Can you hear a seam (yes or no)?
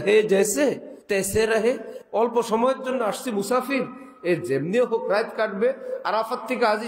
yes